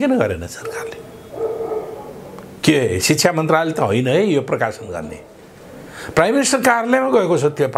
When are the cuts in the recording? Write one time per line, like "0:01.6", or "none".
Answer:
none